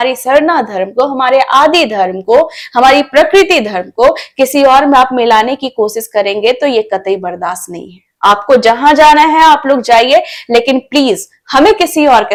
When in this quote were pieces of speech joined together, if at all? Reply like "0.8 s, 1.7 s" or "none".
none